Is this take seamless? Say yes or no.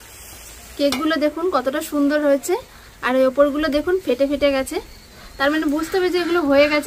yes